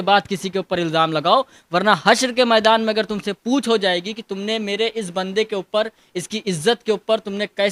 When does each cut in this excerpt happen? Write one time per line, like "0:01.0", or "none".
none